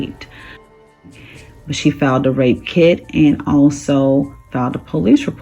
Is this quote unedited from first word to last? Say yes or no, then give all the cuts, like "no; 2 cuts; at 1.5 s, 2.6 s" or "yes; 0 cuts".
no; 1 cut; at 1.1 s